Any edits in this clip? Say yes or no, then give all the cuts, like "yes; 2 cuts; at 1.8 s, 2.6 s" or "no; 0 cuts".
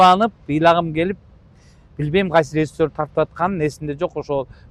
no; 0 cuts